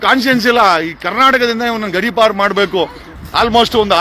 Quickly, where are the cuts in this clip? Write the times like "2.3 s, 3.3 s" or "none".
3.0 s